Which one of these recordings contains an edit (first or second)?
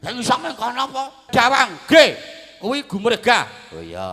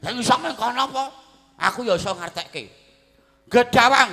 first